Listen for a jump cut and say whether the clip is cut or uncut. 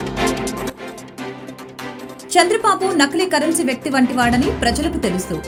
uncut